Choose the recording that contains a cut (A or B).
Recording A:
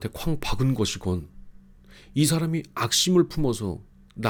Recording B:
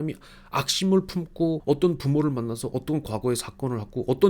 B